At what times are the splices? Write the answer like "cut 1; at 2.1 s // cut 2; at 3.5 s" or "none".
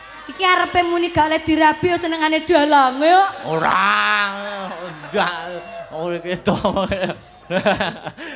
none